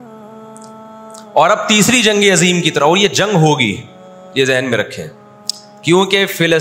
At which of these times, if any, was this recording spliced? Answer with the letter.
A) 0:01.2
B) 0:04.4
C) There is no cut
A